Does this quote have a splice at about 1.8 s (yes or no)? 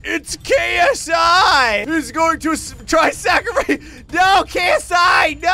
yes